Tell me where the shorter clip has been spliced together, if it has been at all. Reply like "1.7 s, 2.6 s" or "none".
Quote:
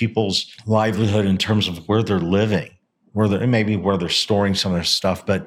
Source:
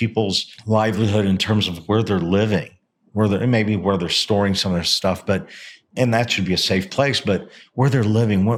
none